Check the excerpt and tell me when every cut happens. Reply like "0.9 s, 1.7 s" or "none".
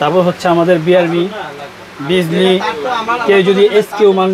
none

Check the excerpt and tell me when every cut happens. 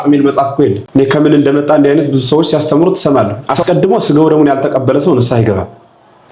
3.4 s

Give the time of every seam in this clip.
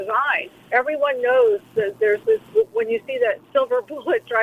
3.4 s

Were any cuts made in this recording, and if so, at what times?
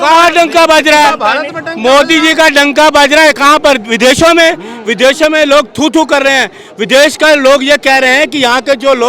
none

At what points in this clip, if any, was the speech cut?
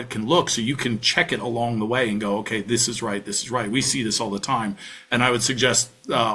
none

